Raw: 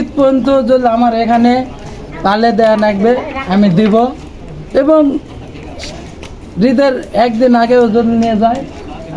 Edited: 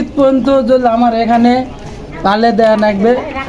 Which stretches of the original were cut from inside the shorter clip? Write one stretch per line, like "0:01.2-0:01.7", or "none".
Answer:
none